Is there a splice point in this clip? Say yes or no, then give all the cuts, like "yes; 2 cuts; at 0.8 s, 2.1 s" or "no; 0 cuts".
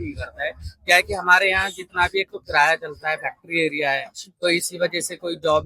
no; 0 cuts